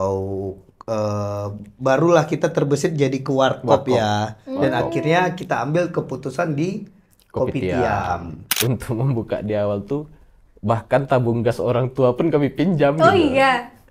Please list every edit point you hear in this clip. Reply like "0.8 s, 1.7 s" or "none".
8.5 s